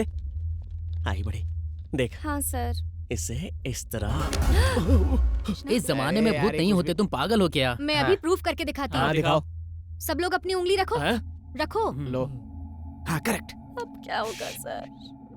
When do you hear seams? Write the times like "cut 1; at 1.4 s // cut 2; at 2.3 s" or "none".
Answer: cut 1; at 5.6 s